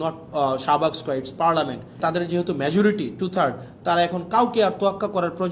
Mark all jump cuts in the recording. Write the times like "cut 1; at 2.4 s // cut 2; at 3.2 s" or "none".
cut 1; at 2.0 s